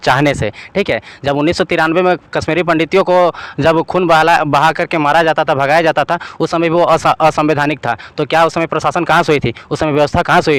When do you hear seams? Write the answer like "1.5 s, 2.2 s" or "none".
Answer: none